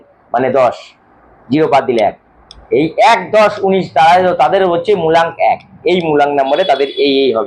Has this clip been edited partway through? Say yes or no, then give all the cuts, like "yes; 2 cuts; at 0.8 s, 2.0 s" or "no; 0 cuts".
no; 0 cuts